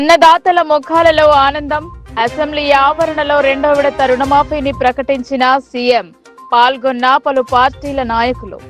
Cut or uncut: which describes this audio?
uncut